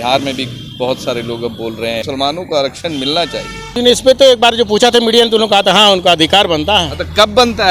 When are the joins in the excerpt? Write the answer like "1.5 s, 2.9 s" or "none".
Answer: 2.0 s, 3.8 s